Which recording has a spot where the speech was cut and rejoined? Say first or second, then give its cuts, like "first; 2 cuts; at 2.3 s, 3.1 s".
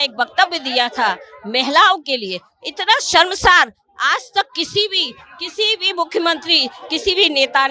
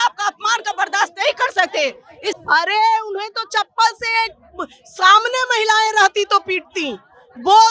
second; 1 cut; at 2.4 s